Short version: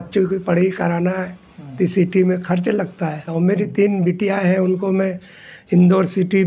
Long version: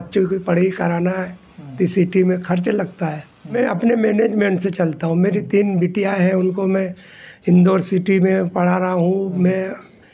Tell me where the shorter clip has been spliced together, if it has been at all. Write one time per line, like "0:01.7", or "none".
0:03.3